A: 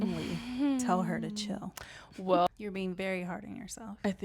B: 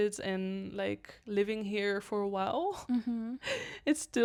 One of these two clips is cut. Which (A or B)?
A